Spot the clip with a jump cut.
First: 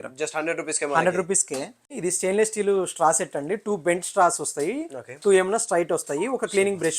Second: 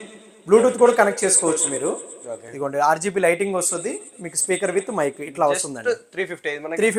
first; 1 cut; at 1.8 s

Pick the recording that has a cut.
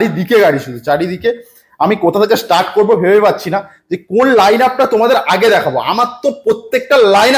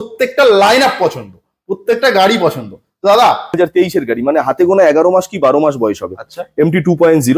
second; 1 cut; at 3.5 s

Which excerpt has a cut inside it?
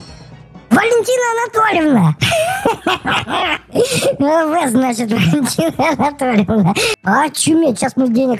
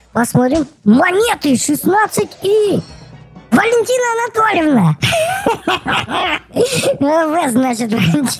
first; 1 cut; at 6.9 s

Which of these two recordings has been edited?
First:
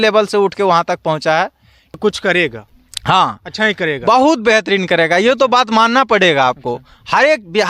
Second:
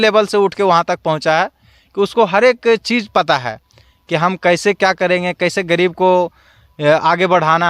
first; 1 cut; at 2.0 s

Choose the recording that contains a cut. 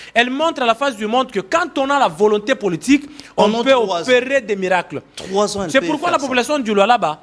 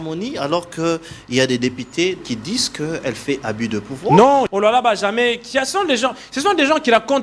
second; 2 cuts; at 2.2 s, 4.5 s

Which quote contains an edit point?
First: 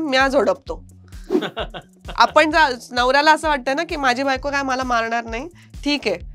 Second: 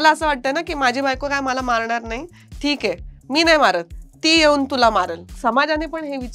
second; 1 cut; at 5.3 s

